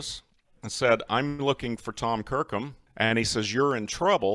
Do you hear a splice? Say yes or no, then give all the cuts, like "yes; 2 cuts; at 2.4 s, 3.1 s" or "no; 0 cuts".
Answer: yes; 1 cut; at 2.8 s